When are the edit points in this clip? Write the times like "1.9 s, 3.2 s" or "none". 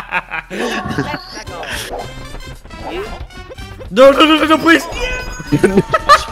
5.4 s